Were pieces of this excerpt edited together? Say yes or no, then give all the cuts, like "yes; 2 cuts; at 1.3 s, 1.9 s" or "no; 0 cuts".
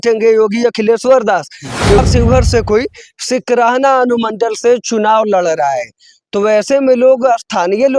yes; 1 cut; at 2.0 s